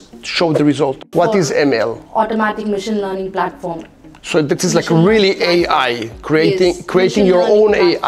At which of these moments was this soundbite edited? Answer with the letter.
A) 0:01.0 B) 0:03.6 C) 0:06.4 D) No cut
A